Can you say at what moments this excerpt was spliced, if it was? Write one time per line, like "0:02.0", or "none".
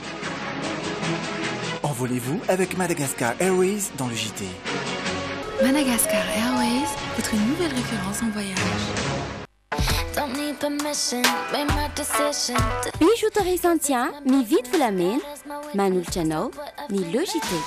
0:09.6

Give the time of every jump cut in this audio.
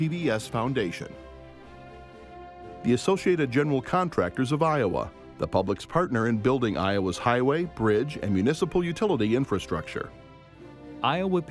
0:01.1
0:02.8

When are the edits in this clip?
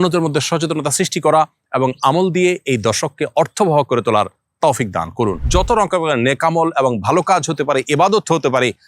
0:05.4

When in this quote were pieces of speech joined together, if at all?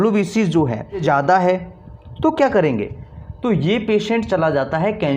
0:01.0

